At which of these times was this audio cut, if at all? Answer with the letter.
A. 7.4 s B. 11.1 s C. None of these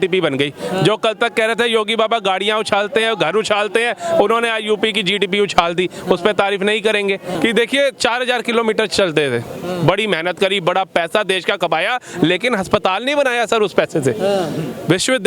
A